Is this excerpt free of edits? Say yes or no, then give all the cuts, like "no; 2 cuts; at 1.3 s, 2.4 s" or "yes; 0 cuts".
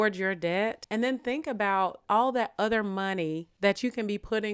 no; 3 cuts; at 0.8 s, 2.0 s, 3.5 s